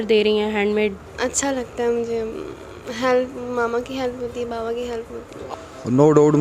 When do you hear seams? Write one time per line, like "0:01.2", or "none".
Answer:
0:01.0
0:05.4